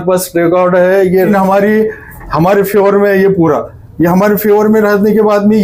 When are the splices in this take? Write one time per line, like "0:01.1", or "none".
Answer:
0:01.3